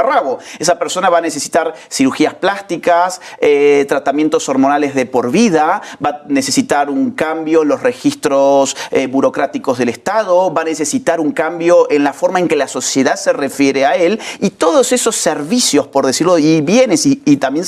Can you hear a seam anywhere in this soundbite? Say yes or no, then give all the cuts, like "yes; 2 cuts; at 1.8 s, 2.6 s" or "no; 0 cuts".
no; 0 cuts